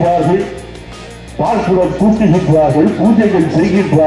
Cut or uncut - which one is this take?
uncut